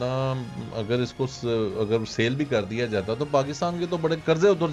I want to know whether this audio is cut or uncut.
uncut